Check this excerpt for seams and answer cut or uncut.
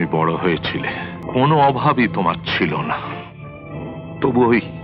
cut